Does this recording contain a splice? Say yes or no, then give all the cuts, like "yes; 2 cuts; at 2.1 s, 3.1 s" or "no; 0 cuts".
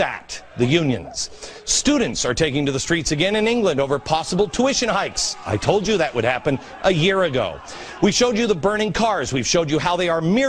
yes; 1 cut; at 7.4 s